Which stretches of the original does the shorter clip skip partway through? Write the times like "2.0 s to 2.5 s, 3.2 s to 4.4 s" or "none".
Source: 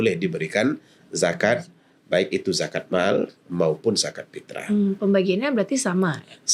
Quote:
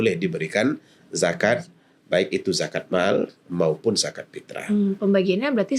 none